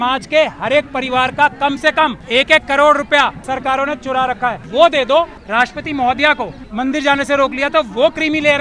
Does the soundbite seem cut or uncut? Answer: cut